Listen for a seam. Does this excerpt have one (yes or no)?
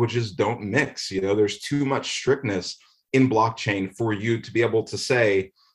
no